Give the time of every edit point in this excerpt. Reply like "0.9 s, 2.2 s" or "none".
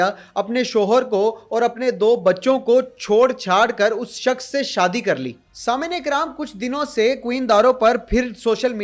none